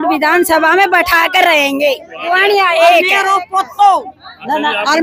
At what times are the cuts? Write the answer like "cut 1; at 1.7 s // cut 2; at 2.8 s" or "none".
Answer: cut 1; at 2.1 s

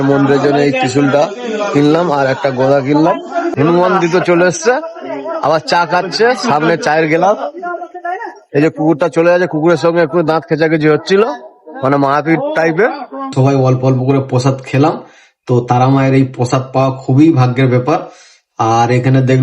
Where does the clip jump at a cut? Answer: cut 1; at 3.5 s // cut 2; at 13.3 s

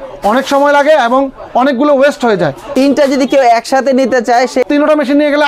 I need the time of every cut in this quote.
cut 1; at 2.7 s // cut 2; at 4.7 s

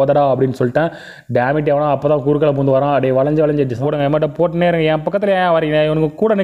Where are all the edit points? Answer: cut 1; at 3.8 s

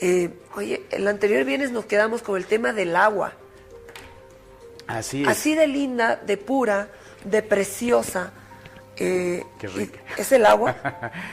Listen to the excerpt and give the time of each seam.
cut 1; at 1.4 s

